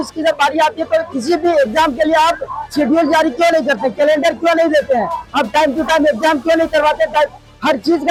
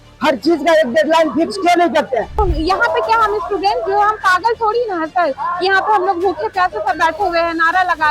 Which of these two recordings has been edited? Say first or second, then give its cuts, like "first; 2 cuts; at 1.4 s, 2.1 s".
second; 1 cut; at 2.4 s